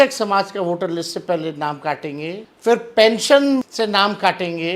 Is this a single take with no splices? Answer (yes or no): no